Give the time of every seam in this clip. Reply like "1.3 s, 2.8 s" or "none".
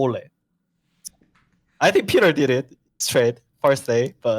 1.0 s

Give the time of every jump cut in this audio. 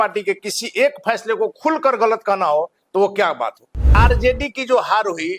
4.0 s

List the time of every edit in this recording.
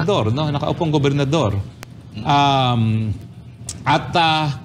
none

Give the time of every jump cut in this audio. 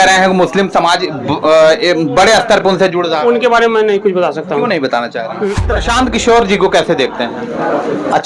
5.7 s

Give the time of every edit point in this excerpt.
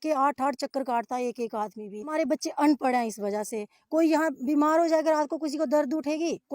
2.1 s

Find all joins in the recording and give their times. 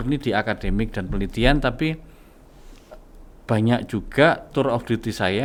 none

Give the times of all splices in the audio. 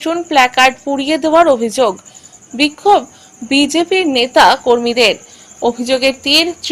none

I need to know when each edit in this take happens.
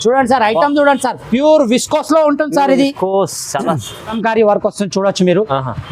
4.1 s

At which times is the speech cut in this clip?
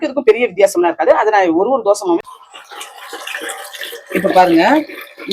2.3 s

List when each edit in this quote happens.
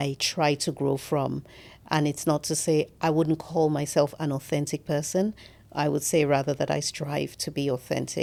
none

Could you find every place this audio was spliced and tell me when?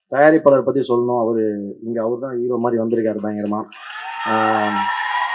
none

